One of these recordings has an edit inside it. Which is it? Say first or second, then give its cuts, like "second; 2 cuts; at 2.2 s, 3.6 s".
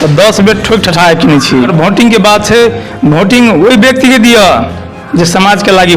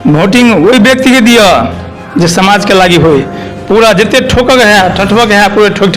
first; 1 cut; at 1.7 s